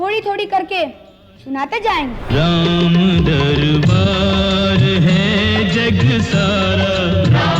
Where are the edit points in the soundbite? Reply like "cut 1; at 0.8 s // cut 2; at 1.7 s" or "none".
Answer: cut 1; at 2.2 s